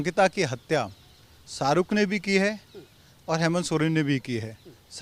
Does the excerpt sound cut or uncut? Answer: uncut